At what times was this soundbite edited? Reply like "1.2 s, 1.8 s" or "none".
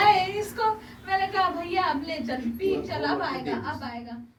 none